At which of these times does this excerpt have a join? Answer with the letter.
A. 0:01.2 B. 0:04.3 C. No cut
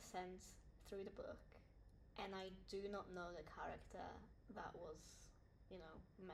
B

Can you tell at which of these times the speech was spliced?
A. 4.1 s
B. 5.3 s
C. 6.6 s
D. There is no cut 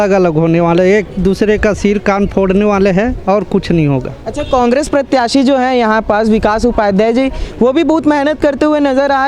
D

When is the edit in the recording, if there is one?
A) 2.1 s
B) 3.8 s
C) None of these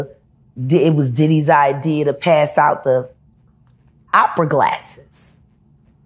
C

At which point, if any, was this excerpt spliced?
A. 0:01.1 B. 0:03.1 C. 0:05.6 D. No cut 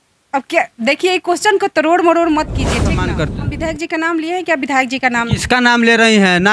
B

